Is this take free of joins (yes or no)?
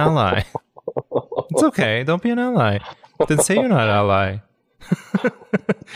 yes